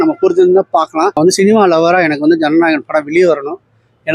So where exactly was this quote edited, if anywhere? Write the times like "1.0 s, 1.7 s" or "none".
1.2 s